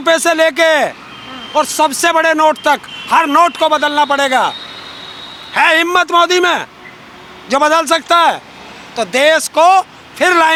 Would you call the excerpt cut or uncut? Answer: uncut